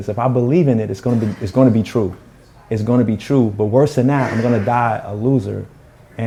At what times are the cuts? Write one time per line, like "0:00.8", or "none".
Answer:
none